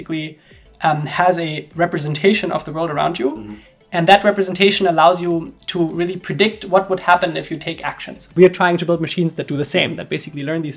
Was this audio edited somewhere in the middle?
yes; 1 cut; at 8.3 s

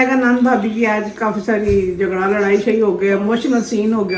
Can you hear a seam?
no; 0 cuts

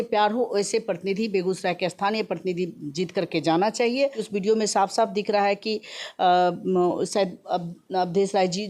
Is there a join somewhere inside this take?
yes; 1 cut; at 4.2 s

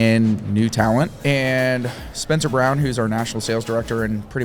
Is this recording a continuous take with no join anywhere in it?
no; 1 cut; at 1.2 s

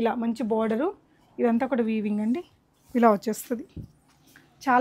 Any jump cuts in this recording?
no; 0 cuts

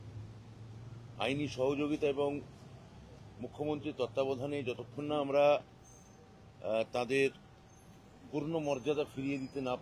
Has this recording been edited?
no; 0 cuts

